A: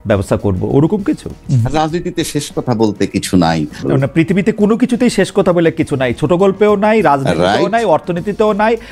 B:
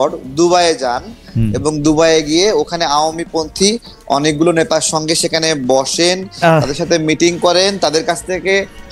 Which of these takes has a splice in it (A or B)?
A